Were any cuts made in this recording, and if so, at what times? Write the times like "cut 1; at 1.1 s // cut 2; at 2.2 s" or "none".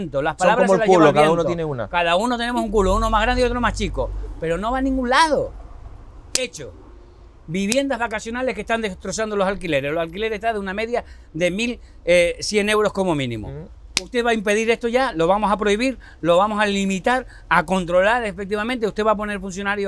none